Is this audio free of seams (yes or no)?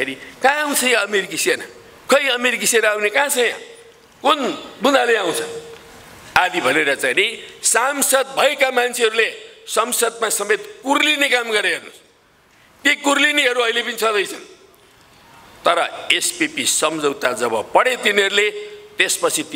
yes